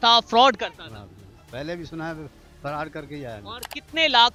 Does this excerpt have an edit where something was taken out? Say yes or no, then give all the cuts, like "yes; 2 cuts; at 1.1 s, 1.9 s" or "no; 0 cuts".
no; 0 cuts